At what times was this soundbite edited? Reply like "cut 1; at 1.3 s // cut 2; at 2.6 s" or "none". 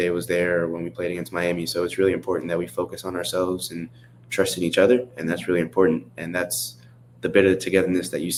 none